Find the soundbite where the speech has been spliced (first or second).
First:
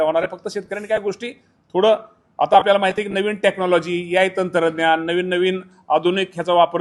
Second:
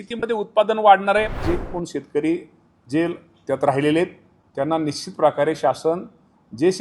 second